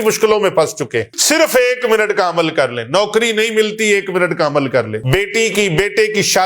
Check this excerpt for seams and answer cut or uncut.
cut